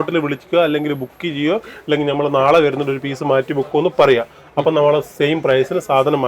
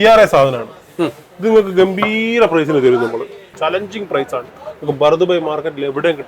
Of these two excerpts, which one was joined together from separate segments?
second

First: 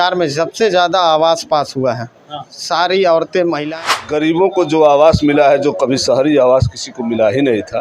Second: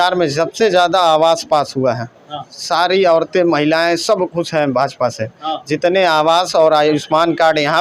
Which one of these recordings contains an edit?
first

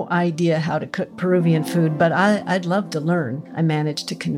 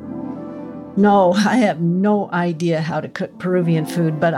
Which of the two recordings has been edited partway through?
second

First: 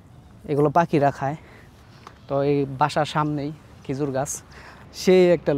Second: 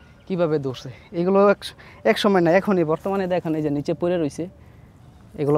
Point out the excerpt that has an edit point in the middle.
first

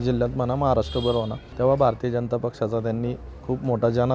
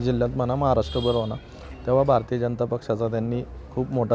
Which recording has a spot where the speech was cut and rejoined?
first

